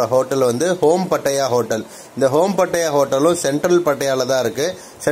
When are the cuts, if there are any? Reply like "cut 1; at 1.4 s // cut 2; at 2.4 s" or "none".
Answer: none